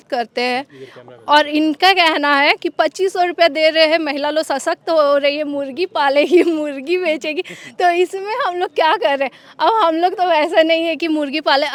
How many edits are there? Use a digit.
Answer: 0